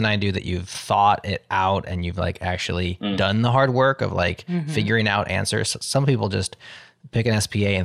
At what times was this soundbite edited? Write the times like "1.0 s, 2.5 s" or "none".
none